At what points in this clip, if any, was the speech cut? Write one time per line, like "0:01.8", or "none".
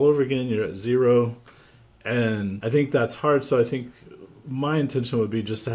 0:02.6